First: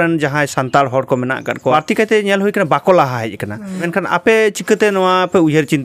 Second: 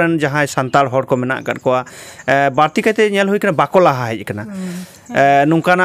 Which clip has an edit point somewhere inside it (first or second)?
first